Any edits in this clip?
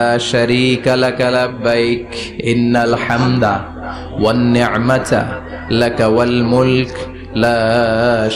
no; 0 cuts

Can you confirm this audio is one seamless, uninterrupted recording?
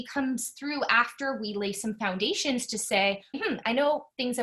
no; 1 cut; at 3.4 s

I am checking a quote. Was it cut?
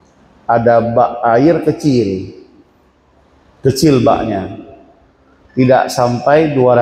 no; 0 cuts

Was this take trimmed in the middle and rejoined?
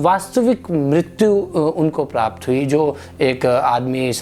no; 0 cuts

